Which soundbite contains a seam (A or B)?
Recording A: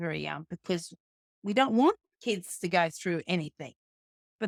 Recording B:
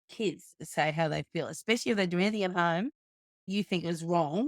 B